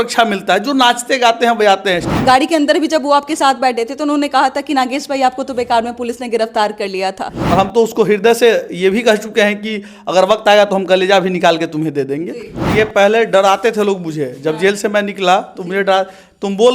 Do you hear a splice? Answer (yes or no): yes